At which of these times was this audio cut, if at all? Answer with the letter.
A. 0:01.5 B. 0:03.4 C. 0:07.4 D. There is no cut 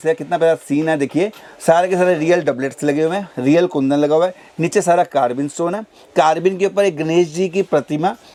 D